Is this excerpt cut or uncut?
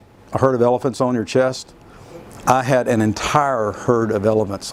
uncut